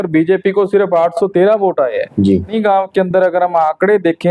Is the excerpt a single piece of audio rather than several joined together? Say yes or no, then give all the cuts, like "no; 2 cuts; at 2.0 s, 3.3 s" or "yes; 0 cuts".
no; 1 cut; at 2.5 s